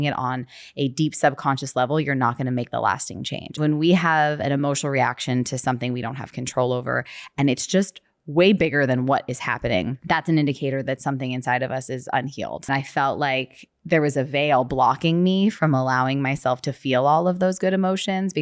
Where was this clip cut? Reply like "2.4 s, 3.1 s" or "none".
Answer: 3.6 s, 10.0 s, 12.7 s